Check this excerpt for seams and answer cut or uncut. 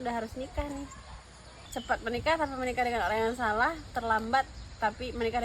cut